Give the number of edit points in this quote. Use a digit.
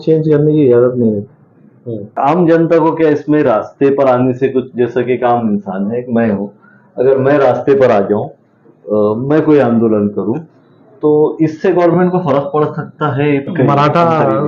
2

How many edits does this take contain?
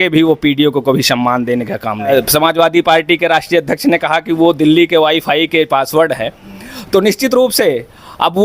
1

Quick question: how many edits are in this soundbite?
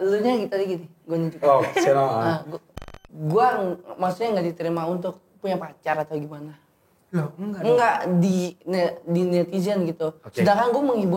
1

